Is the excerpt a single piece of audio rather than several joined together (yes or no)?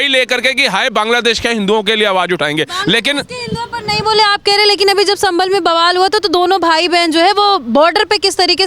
yes